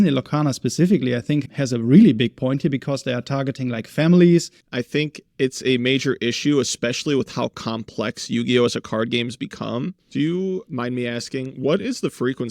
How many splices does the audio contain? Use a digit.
2